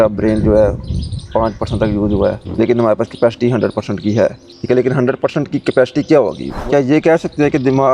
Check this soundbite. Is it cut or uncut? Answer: cut